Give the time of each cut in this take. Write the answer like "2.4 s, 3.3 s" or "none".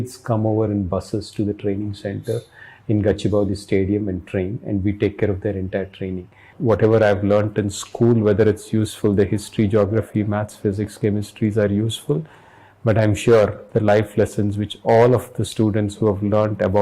6.6 s